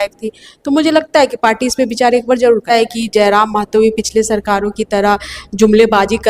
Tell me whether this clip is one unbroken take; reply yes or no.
no